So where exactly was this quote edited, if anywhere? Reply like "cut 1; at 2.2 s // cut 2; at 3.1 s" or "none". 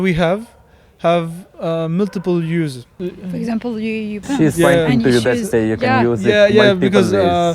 cut 1; at 2.9 s